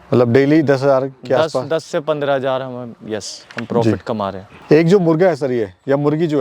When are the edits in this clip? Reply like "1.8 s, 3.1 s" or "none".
none